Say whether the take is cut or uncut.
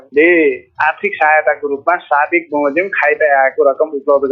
uncut